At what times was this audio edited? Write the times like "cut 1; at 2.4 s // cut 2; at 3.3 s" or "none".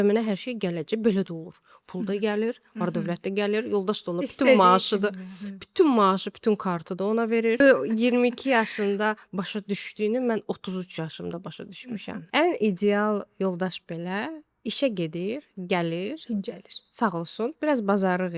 cut 1; at 7.6 s // cut 2; at 12.2 s